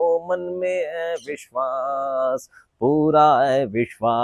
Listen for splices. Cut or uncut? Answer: uncut